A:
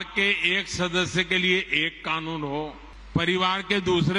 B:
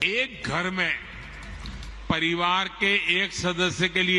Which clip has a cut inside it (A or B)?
A